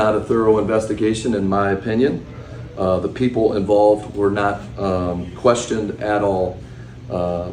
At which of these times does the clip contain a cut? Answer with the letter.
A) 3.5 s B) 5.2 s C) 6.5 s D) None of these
B